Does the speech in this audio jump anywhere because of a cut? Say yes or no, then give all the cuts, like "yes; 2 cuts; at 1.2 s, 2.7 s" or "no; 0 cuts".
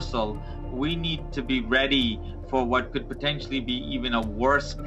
no; 0 cuts